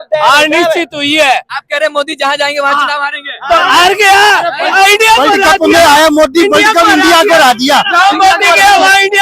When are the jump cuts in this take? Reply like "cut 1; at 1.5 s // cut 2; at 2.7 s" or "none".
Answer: cut 1; at 1.6 s

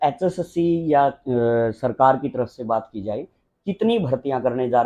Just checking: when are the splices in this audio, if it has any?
none

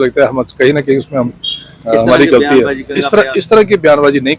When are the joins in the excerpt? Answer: cut 1; at 2.9 s

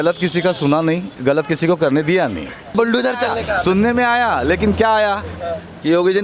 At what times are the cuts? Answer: cut 1; at 1.1 s // cut 2; at 2.7 s

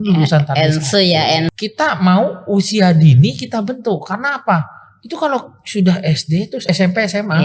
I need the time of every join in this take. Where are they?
cut 1; at 1.5 s // cut 2; at 6.7 s

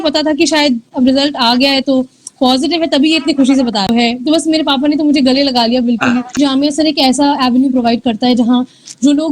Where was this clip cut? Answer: cut 1; at 3.9 s // cut 2; at 6.4 s

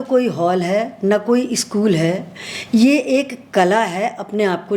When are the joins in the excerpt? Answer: none

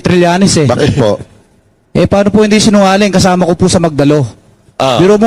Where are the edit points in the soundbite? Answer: none

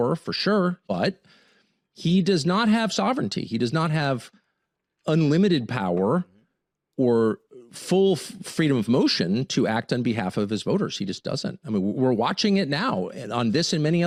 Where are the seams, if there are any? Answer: none

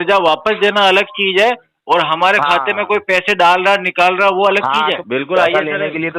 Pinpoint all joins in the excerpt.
cut 1; at 5.0 s

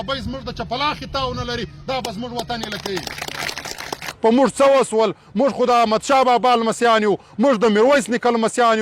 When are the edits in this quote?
cut 1; at 4.1 s

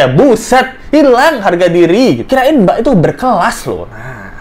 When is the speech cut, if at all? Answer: cut 1; at 2.2 s

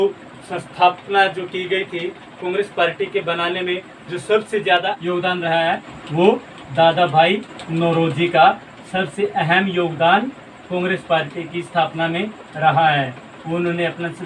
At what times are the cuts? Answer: cut 1; at 5.0 s

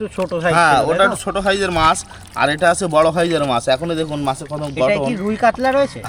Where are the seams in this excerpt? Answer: none

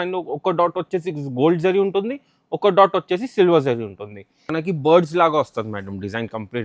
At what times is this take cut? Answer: cut 1; at 4.5 s

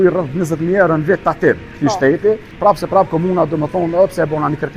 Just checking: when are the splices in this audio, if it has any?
cut 1; at 1.7 s // cut 2; at 2.5 s

